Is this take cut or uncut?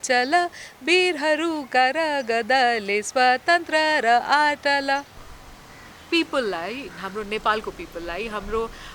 cut